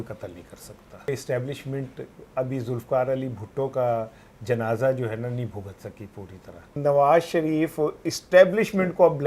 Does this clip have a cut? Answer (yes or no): yes